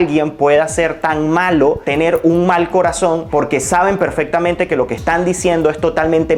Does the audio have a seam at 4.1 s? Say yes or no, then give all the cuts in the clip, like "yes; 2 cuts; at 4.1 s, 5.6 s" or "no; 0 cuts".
no; 0 cuts